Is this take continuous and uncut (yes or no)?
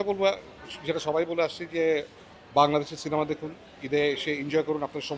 yes